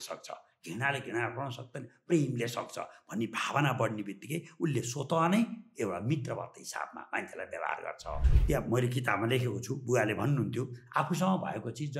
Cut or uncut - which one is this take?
cut